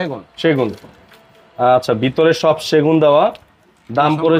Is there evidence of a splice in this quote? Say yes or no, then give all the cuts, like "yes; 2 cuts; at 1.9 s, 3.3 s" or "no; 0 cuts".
no; 0 cuts